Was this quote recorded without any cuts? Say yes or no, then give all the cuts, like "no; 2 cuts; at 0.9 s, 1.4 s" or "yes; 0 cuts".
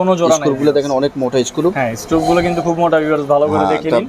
yes; 0 cuts